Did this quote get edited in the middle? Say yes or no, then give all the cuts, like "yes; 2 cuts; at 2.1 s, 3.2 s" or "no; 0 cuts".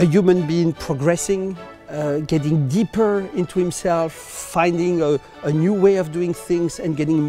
no; 0 cuts